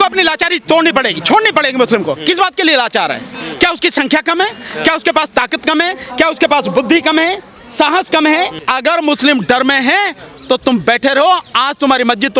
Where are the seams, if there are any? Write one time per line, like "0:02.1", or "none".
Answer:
0:08.6